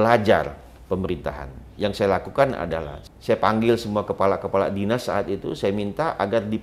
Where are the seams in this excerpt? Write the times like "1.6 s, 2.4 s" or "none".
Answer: 2.9 s